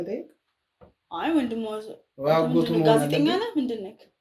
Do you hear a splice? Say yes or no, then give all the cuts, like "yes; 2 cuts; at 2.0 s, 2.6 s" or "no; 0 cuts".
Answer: no; 0 cuts